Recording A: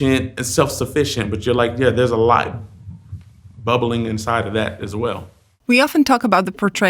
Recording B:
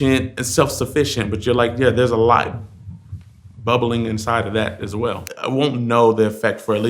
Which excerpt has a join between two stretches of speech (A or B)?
B